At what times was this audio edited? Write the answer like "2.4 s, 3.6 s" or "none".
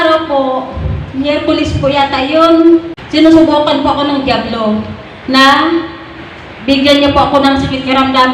3.0 s